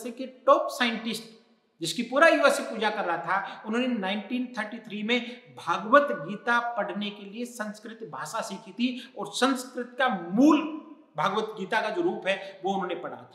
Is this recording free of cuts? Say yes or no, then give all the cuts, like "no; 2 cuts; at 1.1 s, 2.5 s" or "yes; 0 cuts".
yes; 0 cuts